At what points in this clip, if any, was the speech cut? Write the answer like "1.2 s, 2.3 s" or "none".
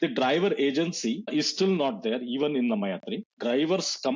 1.3 s, 3.3 s